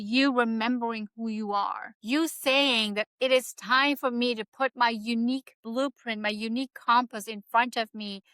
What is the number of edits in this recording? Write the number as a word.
one